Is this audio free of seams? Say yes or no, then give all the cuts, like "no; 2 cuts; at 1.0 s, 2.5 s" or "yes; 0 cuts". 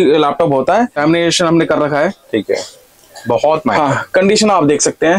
no; 1 cut; at 1.0 s